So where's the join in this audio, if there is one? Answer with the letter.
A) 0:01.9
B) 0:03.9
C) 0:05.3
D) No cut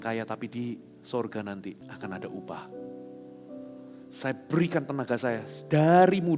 A